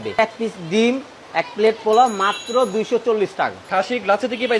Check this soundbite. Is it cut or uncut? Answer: uncut